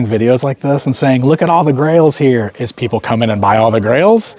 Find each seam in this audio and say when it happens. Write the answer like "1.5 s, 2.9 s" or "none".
none